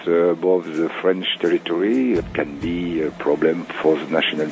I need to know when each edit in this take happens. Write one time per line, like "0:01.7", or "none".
0:02.2
0:03.7